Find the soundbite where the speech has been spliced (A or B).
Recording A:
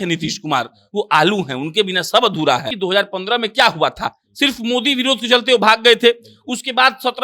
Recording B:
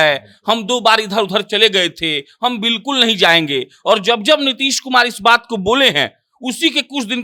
A